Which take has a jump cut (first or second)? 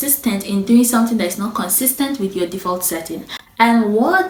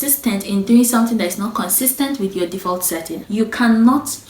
second